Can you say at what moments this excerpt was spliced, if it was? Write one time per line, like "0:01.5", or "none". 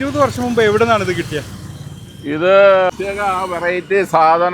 0:02.9